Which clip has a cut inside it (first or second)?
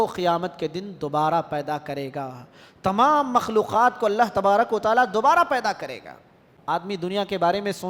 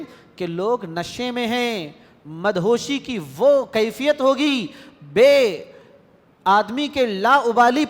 first